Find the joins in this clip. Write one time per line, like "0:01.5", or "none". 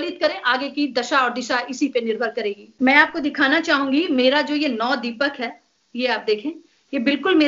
0:02.6